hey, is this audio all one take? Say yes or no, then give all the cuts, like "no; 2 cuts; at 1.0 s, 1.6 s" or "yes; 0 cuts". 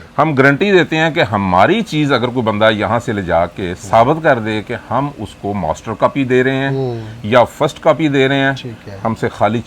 yes; 0 cuts